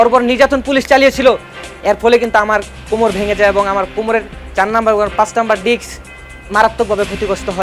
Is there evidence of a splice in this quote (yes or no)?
no